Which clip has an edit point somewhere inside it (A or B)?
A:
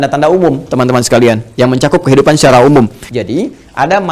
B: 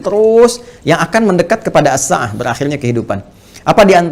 A